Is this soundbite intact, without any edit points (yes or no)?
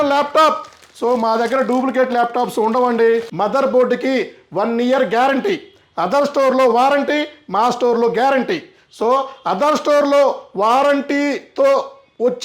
no